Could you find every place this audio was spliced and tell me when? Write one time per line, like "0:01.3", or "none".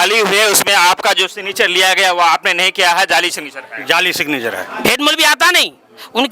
0:04.7